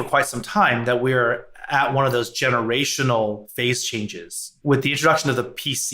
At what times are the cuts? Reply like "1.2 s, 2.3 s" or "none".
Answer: 4.6 s